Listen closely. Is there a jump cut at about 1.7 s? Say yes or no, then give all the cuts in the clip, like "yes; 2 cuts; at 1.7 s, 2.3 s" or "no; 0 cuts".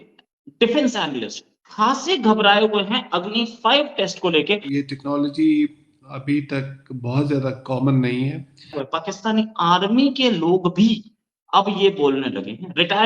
no; 2 cuts; at 4.6 s, 8.8 s